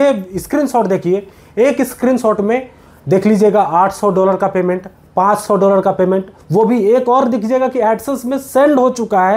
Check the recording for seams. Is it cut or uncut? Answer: uncut